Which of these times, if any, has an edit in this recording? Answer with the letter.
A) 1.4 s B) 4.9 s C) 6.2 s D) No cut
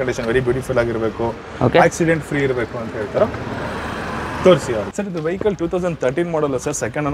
B